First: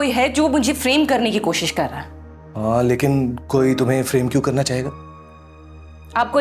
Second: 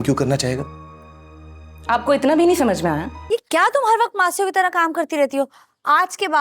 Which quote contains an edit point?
second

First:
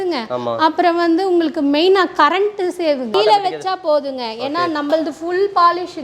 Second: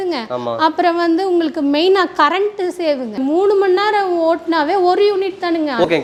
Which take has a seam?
first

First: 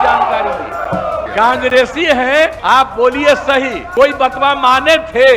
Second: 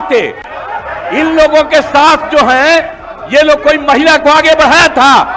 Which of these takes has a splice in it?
first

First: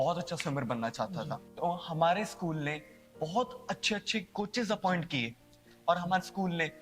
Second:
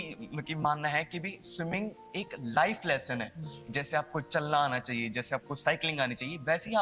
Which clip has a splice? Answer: first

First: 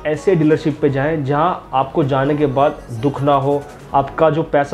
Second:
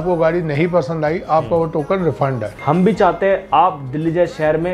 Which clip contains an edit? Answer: second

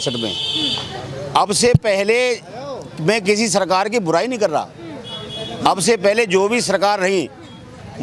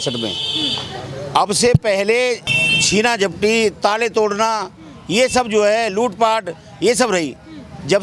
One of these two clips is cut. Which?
second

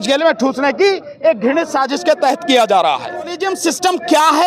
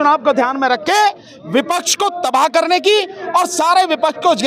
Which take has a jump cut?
first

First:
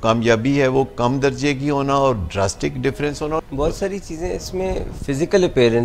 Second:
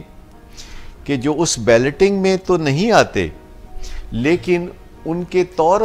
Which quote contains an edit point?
first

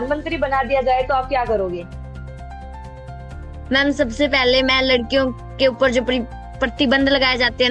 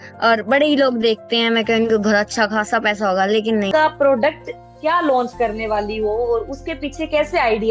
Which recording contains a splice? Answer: second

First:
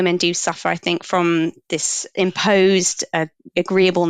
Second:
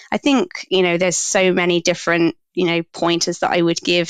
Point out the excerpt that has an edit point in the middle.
first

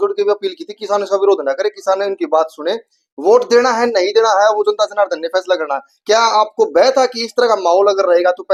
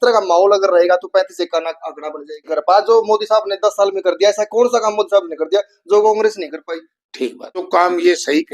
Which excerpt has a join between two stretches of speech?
second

